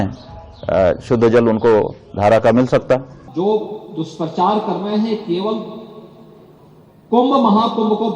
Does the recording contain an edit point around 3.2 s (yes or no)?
yes